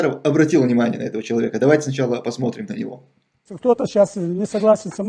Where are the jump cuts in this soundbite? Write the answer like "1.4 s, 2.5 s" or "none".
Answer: none